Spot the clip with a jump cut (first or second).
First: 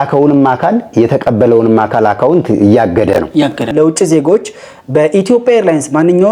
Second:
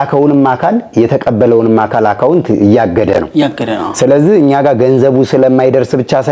first